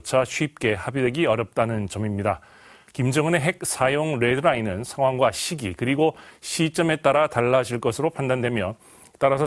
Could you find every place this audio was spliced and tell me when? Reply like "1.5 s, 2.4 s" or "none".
4.3 s